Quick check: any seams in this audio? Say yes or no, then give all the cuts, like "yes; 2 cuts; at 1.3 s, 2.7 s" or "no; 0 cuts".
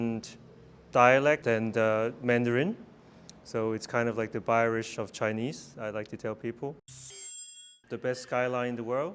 yes; 2 cuts; at 1.4 s, 7.4 s